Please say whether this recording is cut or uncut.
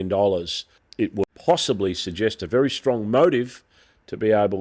cut